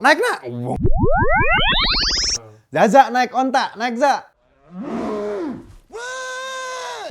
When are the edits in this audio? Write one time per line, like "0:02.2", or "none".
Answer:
0:02.3

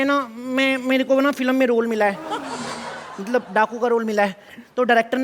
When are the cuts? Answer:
none

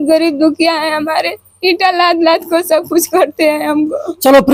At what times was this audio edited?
none

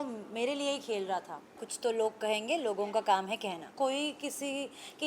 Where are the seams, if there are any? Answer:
0:01.6
0:03.7

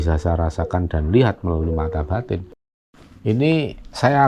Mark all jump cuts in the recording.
0:02.5

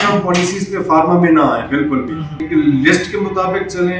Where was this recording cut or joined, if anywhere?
0:02.4

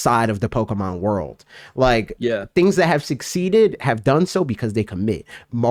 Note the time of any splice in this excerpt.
none

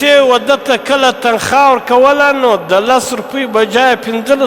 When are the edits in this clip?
none

